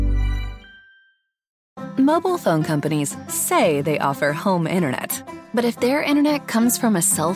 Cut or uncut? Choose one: cut